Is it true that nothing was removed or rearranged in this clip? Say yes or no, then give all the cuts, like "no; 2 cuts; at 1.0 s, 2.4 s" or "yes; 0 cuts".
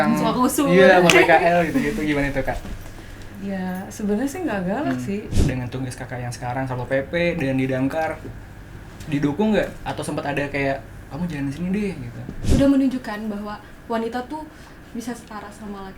no; 2 cuts; at 5.3 s, 12.4 s